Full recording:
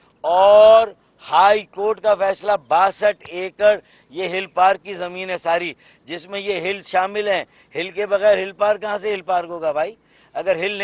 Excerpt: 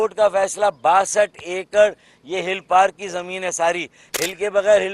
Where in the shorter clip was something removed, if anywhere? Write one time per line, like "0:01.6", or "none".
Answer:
0:04.0